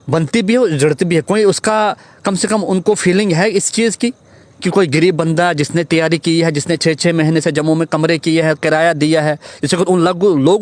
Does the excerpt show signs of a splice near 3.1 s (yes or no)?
no